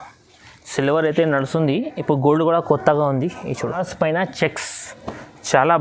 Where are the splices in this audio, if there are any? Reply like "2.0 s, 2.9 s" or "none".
3.8 s